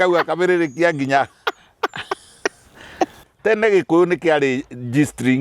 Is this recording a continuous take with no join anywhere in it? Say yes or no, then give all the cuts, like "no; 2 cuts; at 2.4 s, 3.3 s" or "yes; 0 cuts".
no; 1 cut; at 3.2 s